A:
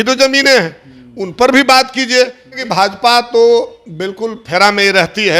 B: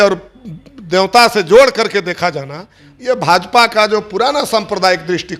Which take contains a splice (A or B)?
A